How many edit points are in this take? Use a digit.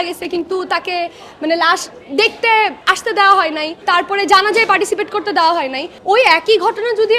3